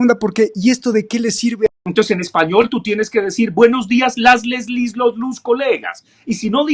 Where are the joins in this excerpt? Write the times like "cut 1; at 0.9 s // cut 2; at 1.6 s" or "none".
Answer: cut 1; at 1.7 s